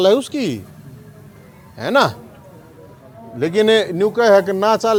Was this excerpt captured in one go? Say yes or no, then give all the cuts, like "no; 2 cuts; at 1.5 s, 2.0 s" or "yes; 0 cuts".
yes; 0 cuts